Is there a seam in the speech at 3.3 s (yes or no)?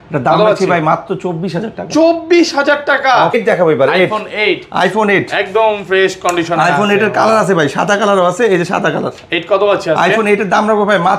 yes